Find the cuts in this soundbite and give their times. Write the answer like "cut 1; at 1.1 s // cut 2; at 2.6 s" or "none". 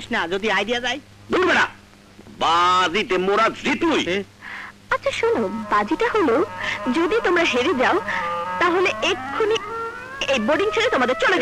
none